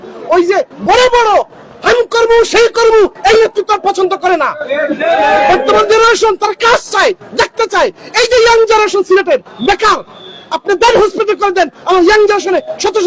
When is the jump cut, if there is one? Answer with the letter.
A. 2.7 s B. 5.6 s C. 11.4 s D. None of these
D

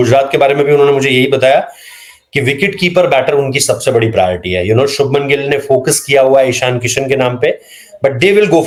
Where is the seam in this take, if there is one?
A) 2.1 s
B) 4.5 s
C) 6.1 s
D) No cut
D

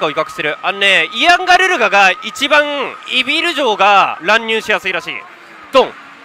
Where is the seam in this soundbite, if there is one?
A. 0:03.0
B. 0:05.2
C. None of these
B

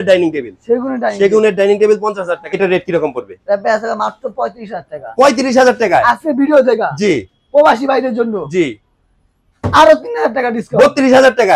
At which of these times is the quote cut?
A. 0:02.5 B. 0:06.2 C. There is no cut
A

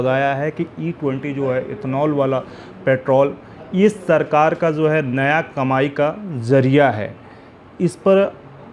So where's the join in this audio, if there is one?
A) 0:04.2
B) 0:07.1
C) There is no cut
C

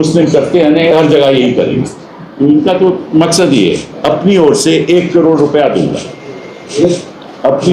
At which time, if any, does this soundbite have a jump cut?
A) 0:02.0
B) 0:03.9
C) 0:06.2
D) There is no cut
B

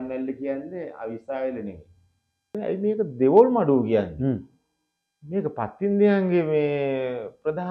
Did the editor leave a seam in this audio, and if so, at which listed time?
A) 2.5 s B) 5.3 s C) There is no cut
A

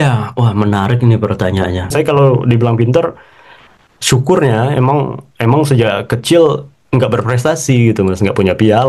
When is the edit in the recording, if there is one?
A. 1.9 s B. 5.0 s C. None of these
A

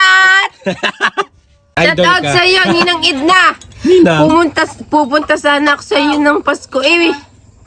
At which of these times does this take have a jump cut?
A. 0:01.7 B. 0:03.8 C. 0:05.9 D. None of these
A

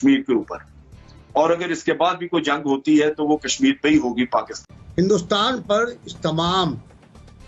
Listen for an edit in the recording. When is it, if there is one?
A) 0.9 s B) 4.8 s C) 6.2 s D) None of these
B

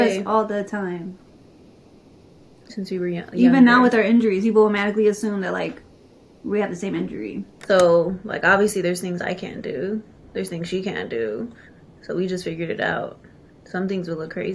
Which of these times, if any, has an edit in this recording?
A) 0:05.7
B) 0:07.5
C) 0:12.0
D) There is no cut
B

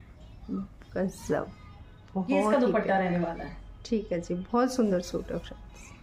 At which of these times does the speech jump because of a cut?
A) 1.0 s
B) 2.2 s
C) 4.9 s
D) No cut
D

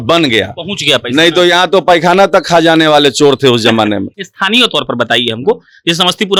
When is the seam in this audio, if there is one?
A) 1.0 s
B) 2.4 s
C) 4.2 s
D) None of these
D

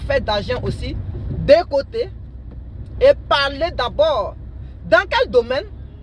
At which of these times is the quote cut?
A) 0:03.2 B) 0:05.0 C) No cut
C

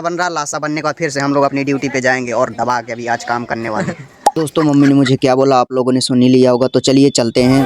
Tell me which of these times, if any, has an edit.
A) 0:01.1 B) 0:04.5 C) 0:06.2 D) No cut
B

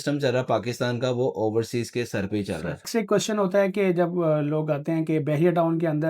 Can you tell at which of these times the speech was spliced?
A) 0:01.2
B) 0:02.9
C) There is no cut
B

